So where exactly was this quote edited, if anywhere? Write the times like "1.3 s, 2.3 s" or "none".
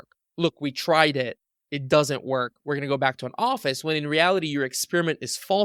none